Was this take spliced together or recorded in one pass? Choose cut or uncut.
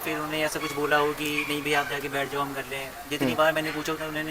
uncut